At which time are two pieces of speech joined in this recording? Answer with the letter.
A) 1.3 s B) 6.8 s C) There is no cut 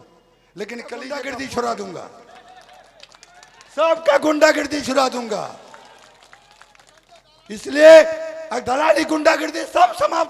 A